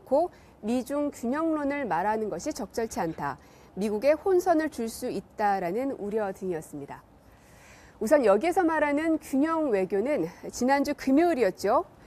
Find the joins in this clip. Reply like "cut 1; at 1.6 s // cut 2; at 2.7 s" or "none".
cut 1; at 1.5 s